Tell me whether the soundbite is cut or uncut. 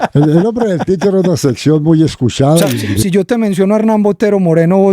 cut